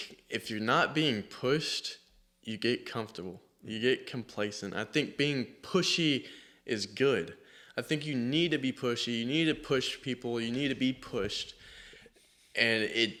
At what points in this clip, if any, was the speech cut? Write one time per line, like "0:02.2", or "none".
none

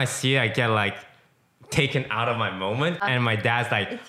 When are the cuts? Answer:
0:03.0

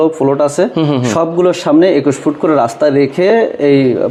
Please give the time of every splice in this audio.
none

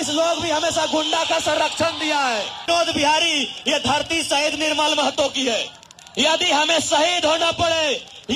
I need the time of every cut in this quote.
0:02.6

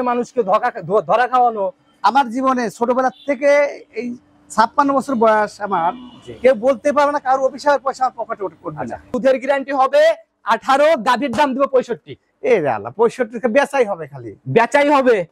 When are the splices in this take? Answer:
0:09.1

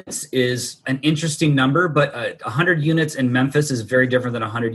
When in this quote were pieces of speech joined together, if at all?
none

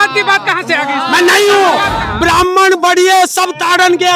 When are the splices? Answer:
0:02.0

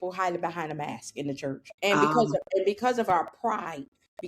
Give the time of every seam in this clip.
0:01.7

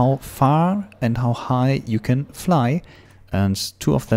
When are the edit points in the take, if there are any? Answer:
0:03.0

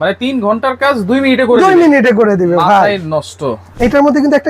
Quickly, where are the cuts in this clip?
0:03.6

